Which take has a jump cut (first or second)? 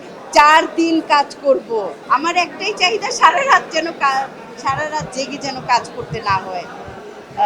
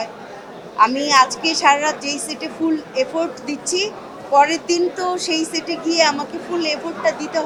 first